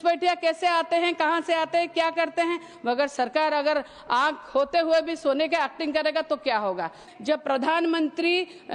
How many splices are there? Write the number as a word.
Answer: one